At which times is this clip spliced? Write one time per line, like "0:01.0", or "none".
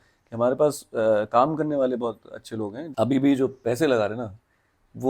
0:02.8